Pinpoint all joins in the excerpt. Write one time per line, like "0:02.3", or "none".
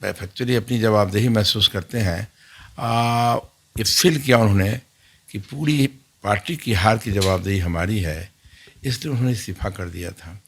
none